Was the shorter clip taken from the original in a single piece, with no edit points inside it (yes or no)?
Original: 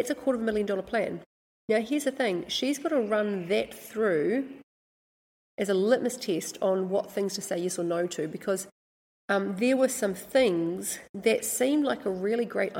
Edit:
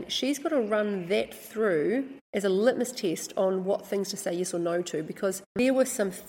no